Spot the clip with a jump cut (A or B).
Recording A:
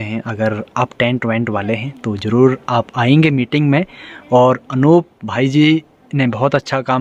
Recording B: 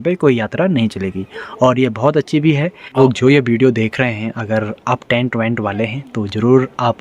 B